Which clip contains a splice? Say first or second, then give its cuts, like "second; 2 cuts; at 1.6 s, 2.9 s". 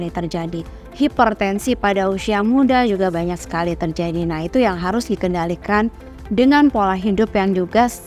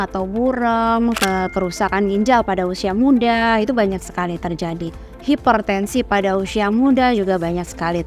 second; 1 cut; at 1.2 s